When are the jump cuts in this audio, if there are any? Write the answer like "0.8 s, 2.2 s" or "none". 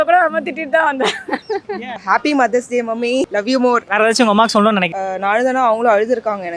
2.0 s, 4.9 s